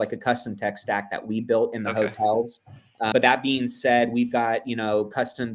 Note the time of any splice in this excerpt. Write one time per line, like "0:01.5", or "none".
0:03.1